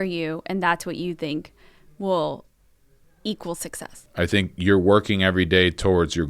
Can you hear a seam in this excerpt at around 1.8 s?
no; 1 cut; at 4.1 s

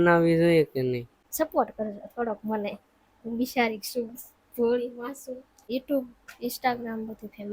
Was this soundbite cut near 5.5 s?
yes; 2 cuts; at 1.2 s, 5.5 s

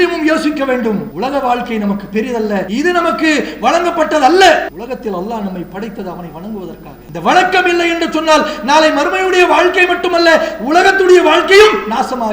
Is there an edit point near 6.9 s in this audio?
yes; 4 cuts; at 1.1 s, 2.7 s, 4.7 s, 6.9 s

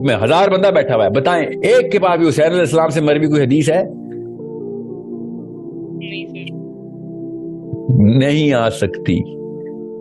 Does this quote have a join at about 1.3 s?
no; 3 cuts; at 3.9 s, 5.9 s, 7.9 s

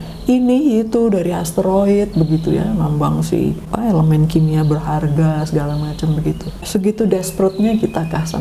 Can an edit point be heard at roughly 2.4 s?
no; 2 cuts; at 3.7 s, 6.7 s

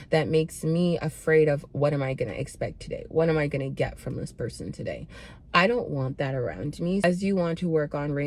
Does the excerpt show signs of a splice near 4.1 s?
no; 1 cut; at 7.0 s

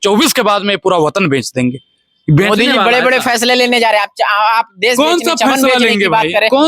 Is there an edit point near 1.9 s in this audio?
no; 0 cuts

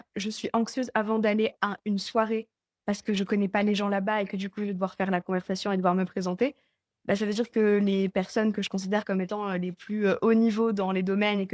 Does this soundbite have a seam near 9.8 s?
no; 0 cuts

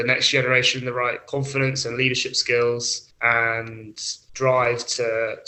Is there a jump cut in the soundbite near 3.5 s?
no; 0 cuts

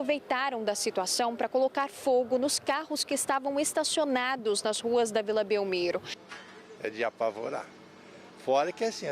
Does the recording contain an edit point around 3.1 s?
no; 1 cut; at 6.2 s

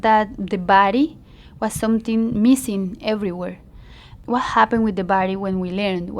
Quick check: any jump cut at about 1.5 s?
no; 1 cut; at 4.2 s

